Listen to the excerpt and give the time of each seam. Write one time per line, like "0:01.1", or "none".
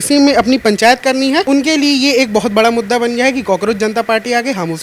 0:01.4